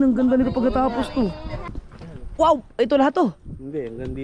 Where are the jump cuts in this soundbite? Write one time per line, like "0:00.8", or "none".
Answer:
0:01.8